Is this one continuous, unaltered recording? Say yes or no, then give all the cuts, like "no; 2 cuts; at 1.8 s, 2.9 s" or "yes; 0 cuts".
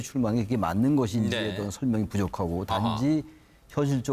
no; 1 cut; at 3.2 s